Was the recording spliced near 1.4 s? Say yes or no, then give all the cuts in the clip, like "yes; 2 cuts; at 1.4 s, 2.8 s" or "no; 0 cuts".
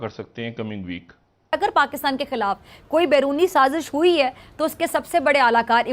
yes; 1 cut; at 1.4 s